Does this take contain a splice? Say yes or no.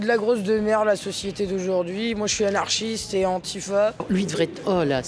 yes